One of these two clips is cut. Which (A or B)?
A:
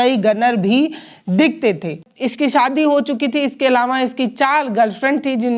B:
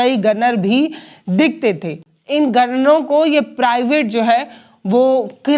A